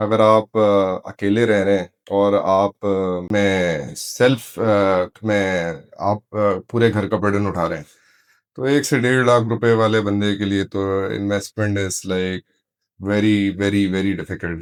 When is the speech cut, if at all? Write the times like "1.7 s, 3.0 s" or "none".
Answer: none